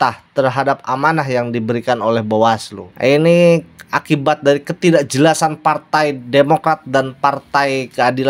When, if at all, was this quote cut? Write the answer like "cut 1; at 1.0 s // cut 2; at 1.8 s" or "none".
cut 1; at 2.8 s